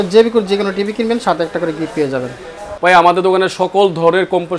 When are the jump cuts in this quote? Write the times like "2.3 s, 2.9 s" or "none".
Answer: 2.7 s